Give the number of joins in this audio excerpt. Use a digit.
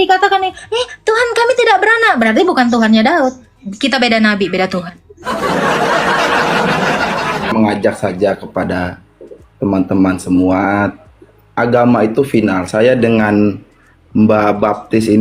1